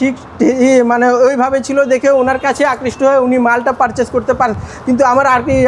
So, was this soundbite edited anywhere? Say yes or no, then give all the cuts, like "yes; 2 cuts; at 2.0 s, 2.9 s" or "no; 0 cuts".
no; 0 cuts